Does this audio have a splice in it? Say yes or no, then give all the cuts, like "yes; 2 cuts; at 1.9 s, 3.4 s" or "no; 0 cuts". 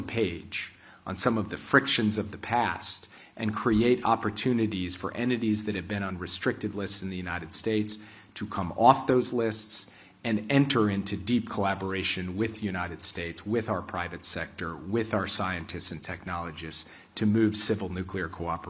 no; 0 cuts